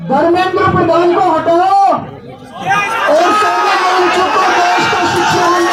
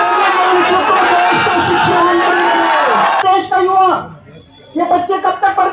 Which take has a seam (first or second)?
second